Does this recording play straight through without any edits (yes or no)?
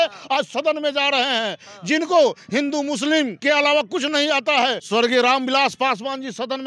no